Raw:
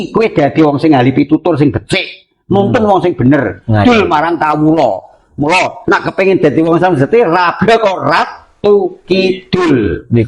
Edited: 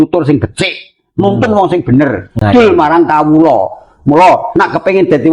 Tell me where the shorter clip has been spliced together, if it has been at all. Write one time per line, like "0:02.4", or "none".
none